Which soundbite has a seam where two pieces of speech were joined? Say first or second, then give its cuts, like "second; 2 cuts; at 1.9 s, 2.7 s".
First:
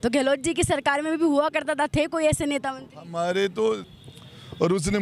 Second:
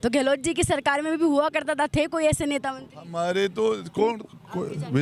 first; 1 cut; at 3.9 s